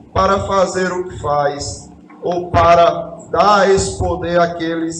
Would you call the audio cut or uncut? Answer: uncut